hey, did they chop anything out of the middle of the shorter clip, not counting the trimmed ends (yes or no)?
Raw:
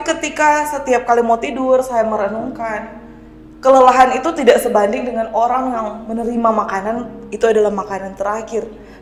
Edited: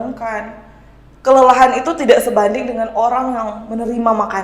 no